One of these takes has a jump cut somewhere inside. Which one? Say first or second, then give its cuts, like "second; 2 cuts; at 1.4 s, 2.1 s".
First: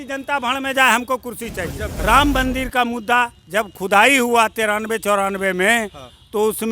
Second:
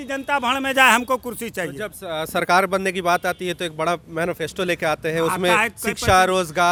first; 1 cut; at 1.8 s